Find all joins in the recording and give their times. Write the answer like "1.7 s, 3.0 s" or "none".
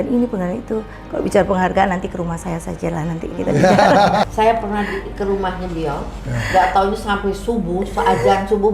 4.3 s